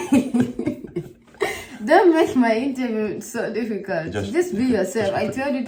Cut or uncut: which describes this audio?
uncut